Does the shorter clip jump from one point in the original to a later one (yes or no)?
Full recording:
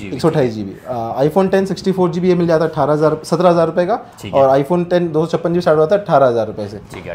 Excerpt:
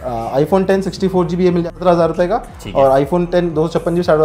yes